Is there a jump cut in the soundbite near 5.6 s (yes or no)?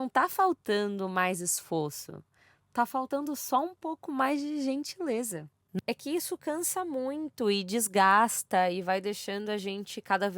yes